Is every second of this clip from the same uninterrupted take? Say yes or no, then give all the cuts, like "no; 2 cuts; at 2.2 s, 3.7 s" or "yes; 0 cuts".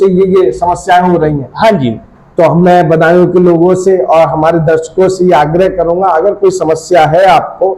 yes; 0 cuts